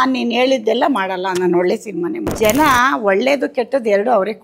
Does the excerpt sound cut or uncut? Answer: cut